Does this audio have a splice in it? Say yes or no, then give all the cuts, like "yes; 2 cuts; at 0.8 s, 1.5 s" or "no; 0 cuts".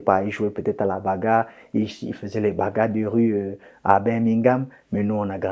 no; 0 cuts